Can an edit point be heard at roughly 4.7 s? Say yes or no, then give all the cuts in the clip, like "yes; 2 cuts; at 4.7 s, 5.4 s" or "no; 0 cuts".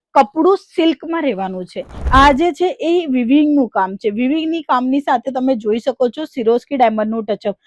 no; 1 cut; at 2.0 s